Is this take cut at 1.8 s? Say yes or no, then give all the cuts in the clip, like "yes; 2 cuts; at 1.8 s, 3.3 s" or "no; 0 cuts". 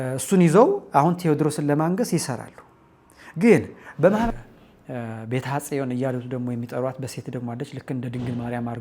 no; 1 cut; at 4.3 s